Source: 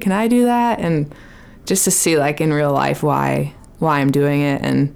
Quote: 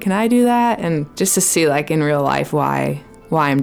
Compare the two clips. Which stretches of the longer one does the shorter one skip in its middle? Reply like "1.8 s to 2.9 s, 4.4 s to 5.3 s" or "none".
1.1 s to 1.6 s